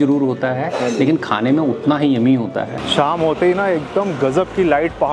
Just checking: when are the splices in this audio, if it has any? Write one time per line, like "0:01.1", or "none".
0:02.7

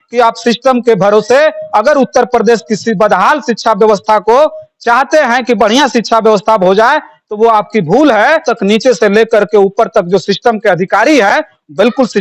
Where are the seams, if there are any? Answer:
0:08.5

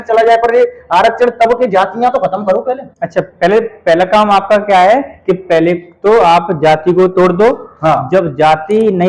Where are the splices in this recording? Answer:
none

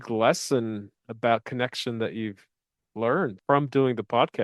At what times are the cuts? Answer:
0:03.4

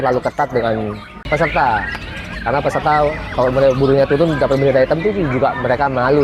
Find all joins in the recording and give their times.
0:01.2

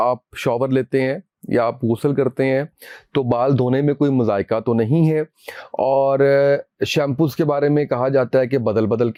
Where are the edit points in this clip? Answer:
none

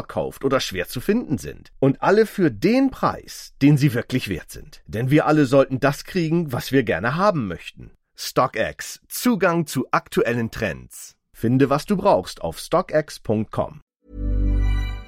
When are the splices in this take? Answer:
0:13.8

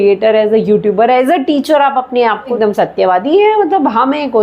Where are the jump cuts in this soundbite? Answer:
0:02.5

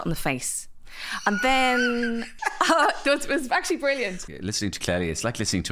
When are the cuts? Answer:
0:02.3
0:04.2

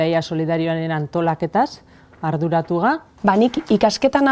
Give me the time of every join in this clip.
0:03.1

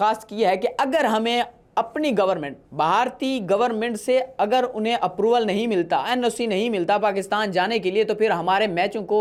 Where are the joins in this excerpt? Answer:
none

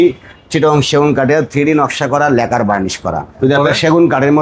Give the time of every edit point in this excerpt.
0:03.3

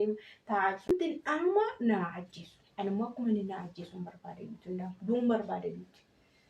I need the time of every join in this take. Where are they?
0:00.9

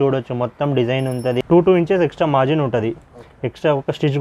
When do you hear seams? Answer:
0:01.4

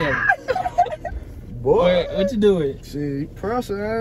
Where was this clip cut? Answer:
none

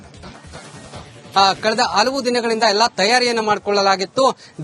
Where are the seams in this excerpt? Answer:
0:01.0

